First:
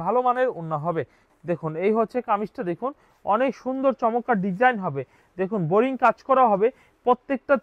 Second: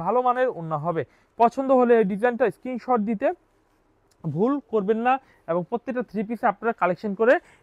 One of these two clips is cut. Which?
first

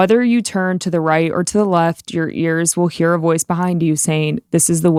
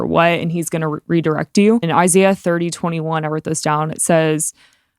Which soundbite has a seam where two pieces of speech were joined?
second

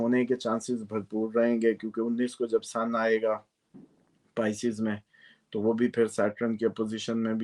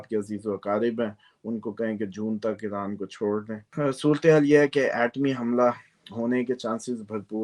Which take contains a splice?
second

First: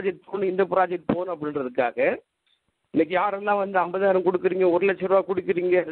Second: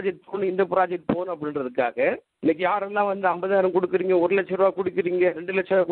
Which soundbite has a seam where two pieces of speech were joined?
second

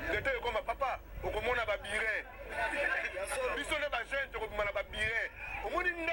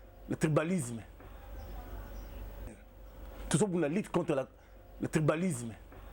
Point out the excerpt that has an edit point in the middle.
second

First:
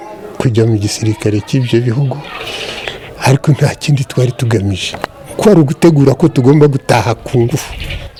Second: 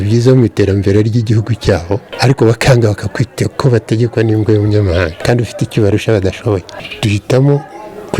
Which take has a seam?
second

